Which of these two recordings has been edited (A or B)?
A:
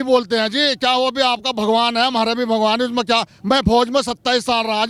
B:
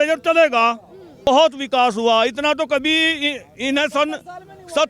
B